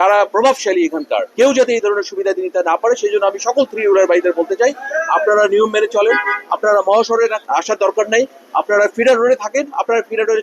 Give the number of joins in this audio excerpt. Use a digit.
1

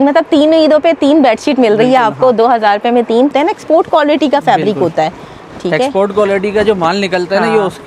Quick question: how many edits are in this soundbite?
1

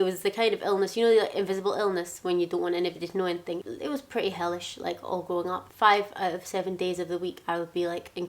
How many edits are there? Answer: 2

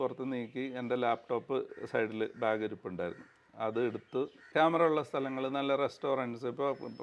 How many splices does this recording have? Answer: 1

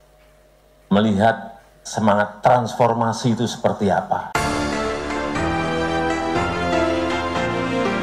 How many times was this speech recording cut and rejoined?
1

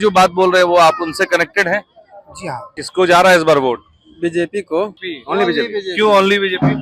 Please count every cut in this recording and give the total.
2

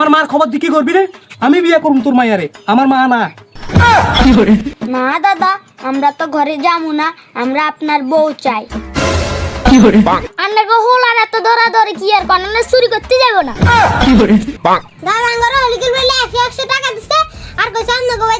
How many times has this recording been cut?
3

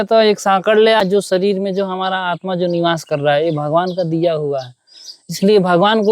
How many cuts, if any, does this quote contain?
1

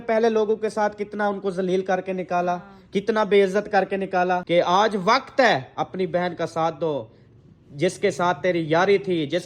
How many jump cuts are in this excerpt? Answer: 1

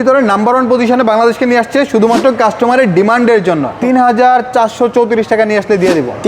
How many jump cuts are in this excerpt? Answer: 1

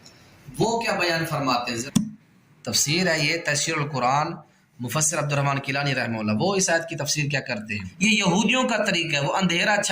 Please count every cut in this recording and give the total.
2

